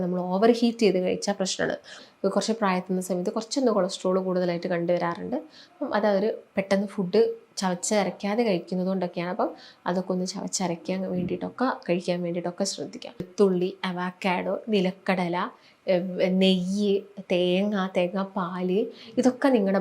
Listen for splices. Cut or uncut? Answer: cut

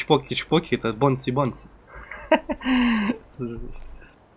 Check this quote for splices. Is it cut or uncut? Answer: uncut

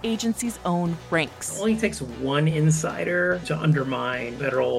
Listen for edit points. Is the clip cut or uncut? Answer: cut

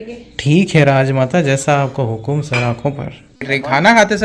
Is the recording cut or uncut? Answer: cut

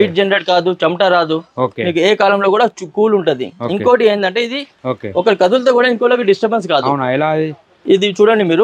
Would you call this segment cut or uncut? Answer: cut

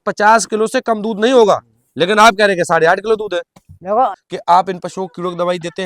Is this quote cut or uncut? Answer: cut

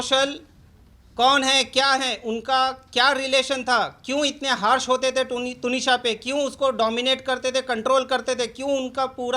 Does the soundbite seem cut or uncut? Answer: uncut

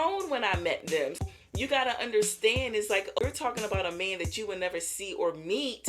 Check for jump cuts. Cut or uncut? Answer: cut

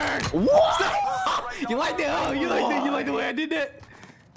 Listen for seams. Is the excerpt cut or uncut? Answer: uncut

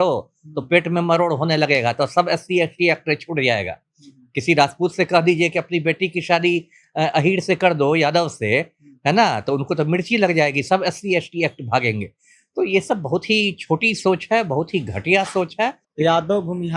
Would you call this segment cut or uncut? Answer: cut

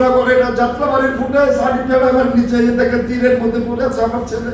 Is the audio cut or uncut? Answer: uncut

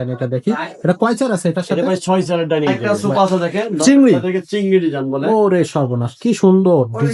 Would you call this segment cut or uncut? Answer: cut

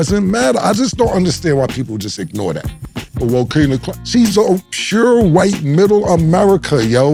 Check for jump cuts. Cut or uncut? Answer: uncut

